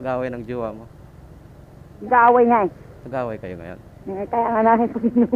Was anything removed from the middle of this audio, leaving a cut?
no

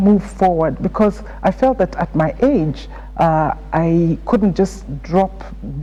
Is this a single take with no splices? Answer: yes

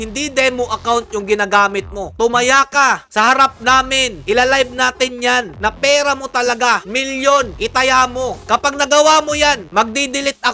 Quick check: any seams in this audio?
no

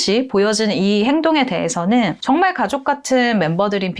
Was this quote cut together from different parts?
no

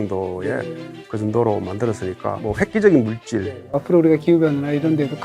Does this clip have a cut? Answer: yes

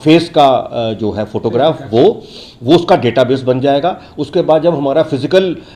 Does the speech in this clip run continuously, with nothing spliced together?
yes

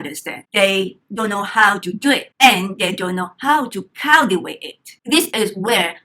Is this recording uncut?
yes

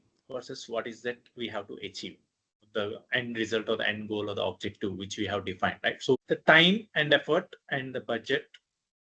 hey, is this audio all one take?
no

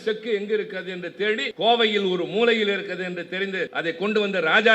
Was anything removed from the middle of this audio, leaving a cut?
yes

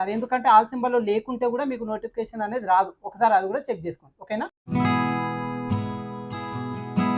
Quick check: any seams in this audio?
yes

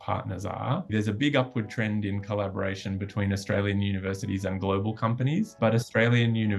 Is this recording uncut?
no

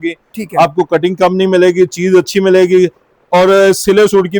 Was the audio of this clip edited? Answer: no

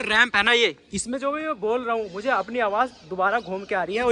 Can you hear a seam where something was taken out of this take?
no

